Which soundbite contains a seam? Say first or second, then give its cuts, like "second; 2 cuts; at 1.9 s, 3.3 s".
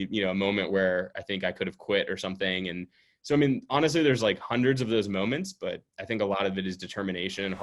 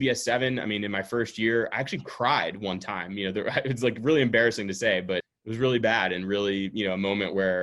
second; 1 cut; at 5.3 s